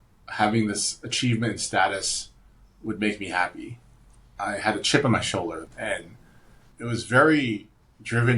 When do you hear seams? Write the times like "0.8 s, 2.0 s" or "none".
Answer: 4.2 s, 5.6 s